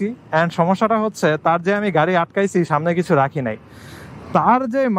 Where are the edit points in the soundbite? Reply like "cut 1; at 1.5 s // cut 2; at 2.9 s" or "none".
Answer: none